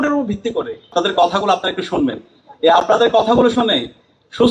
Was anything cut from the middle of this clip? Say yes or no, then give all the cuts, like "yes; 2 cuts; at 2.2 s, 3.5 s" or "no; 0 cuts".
yes; 1 cut; at 0.9 s